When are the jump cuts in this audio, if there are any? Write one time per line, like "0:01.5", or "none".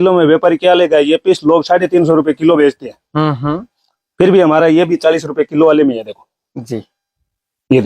none